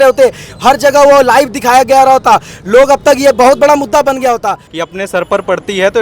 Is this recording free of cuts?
no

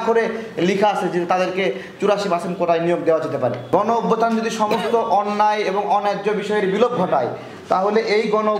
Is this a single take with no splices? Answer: no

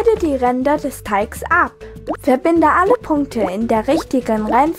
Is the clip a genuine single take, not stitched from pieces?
yes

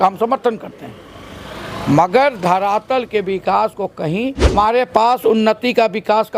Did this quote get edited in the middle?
yes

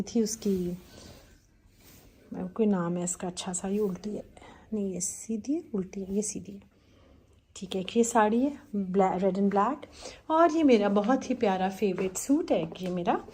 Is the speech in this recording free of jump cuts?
yes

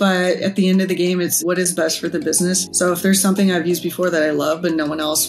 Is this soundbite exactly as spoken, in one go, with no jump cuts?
no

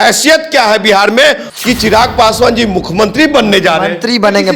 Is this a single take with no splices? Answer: no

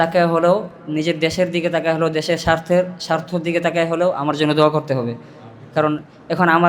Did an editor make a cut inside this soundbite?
no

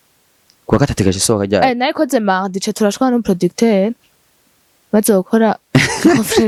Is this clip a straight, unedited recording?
yes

